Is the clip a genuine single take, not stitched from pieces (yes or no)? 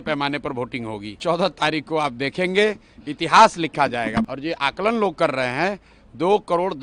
no